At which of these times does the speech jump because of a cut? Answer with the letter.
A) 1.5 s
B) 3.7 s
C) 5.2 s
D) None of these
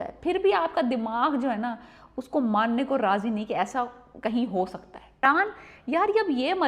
C